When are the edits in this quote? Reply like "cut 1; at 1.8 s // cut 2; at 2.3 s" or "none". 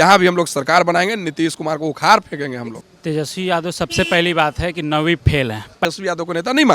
cut 1; at 2.7 s // cut 2; at 5.8 s